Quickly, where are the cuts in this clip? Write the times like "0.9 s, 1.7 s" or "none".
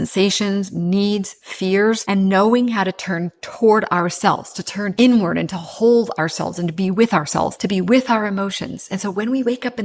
2.0 s, 4.8 s, 7.6 s